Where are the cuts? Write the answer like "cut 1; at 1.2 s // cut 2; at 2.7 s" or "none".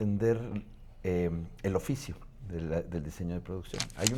none

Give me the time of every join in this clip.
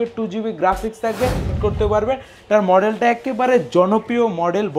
cut 1; at 1.5 s

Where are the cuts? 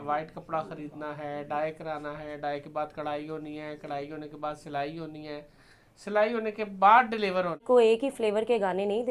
cut 1; at 7.6 s

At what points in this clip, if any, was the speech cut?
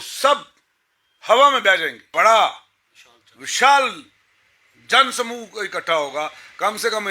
cut 1; at 2.0 s

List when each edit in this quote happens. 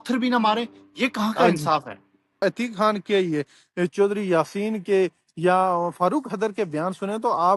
cut 1; at 2.4 s

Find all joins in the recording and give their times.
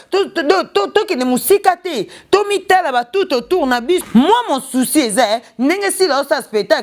cut 1; at 4.0 s

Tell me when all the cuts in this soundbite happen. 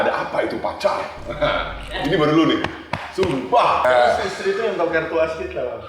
cut 1; at 3.8 s

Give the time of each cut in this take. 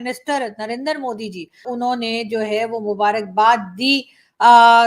cut 1; at 1.6 s

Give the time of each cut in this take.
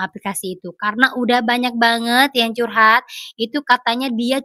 none

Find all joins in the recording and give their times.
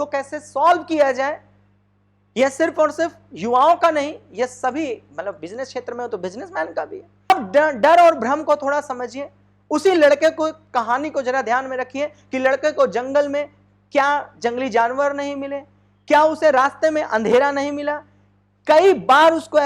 cut 1; at 7.3 s

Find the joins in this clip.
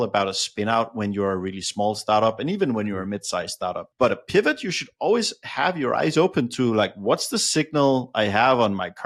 none

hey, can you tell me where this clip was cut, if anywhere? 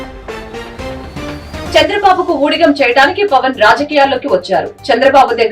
cut 1; at 1.7 s

